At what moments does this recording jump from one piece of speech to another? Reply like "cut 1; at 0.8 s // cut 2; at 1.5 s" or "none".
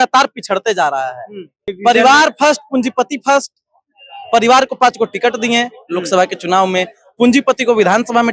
cut 1; at 1.7 s